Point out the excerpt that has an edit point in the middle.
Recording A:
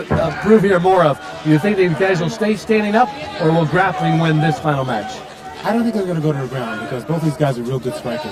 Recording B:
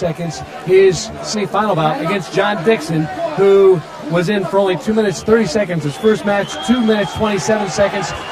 B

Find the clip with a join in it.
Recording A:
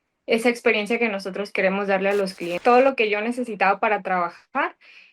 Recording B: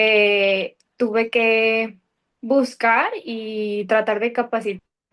A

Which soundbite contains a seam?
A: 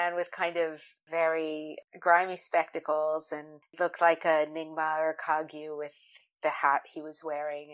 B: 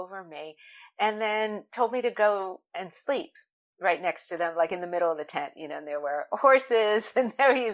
A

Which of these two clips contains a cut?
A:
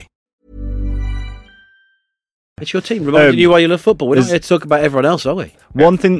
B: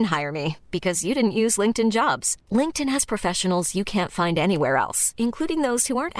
A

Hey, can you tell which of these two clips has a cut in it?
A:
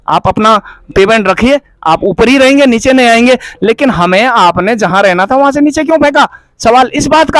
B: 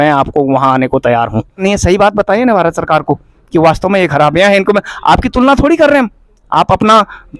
B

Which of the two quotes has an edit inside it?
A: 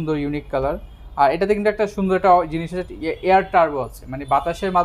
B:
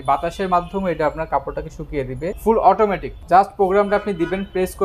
B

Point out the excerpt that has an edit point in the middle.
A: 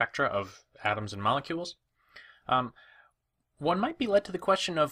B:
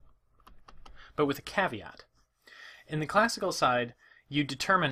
A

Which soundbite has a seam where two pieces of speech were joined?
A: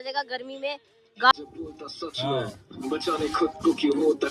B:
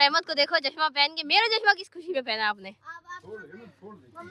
A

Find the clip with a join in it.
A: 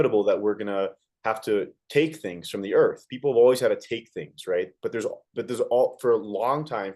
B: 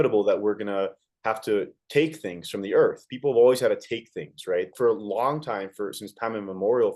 B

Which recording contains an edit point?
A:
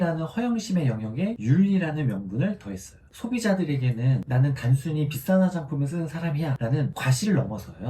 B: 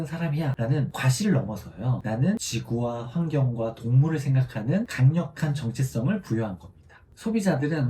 B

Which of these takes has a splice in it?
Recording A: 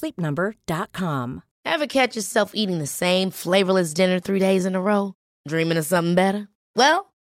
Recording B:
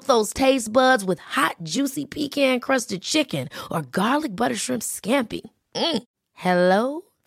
A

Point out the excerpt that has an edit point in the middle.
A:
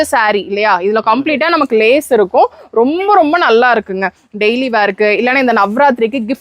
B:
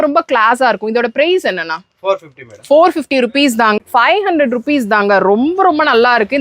B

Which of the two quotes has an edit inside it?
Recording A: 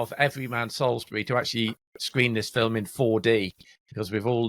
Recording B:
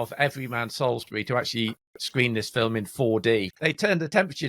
B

